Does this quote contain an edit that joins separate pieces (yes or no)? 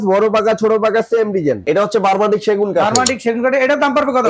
yes